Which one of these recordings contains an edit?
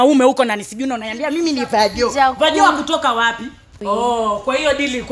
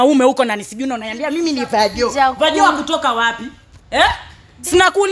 first; 1 cut; at 3.8 s

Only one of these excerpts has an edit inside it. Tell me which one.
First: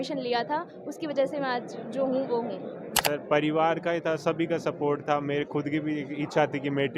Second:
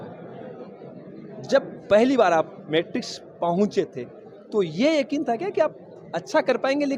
first; 1 cut; at 2.9 s

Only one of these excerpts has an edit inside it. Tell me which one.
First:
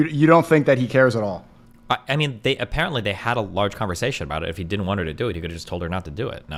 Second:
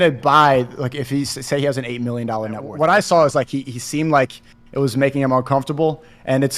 second; 1 cut; at 2.6 s

